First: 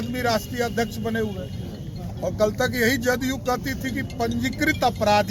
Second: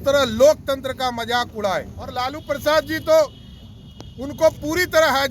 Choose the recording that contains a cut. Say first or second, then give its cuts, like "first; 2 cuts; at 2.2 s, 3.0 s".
second; 1 cut; at 2.3 s